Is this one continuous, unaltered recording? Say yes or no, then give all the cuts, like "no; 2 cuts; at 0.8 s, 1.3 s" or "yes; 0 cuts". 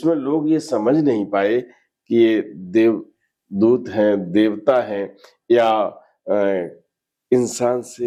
yes; 0 cuts